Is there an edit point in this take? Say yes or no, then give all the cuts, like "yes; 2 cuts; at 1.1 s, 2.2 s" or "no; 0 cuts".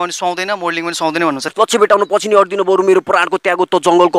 yes; 1 cut; at 1.4 s